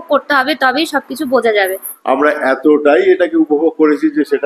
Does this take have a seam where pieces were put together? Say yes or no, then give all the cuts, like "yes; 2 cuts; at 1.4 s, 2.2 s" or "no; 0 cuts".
yes; 1 cut; at 1.9 s